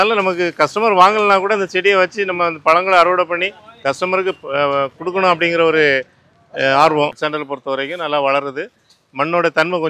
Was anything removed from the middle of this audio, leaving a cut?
yes; 1 cut; at 7.2 s

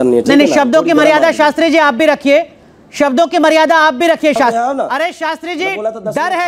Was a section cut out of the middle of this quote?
yes; 1 cut; at 4.5 s

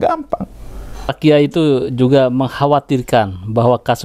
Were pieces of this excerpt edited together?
yes; 1 cut; at 1.2 s

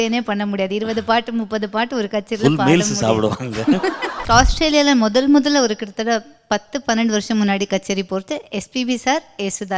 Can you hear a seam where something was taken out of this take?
yes; 1 cut; at 4.2 s

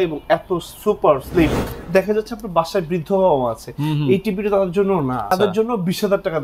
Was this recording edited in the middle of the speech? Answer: yes; 2 cuts; at 1.7 s, 5.3 s

